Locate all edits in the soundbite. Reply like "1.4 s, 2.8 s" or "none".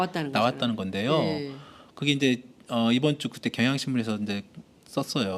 none